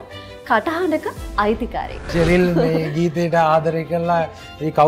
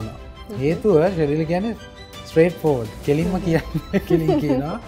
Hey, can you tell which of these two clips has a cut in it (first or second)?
first